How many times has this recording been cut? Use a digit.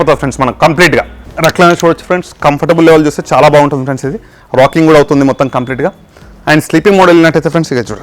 1